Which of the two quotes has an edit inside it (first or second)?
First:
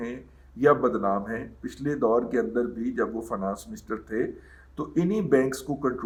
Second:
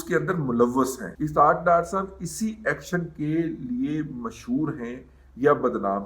second